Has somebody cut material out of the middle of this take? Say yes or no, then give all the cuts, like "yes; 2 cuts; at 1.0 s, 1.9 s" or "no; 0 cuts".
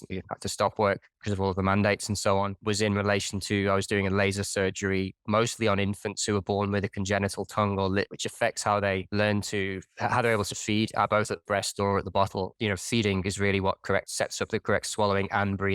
yes; 3 cuts; at 8.1 s, 12.5 s, 14.1 s